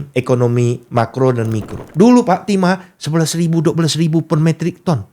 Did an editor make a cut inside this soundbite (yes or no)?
yes